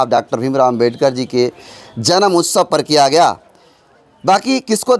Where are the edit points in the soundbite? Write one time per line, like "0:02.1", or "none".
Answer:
none